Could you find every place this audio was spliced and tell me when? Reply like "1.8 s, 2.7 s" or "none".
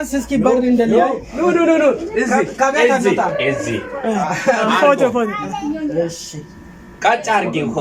none